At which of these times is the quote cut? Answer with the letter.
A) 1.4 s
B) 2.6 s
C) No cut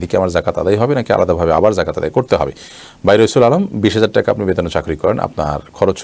C